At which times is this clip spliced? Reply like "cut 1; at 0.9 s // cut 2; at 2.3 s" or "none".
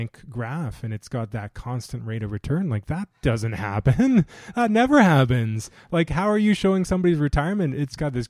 none